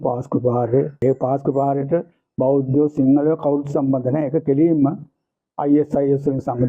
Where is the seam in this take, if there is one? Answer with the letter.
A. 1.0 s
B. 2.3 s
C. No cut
A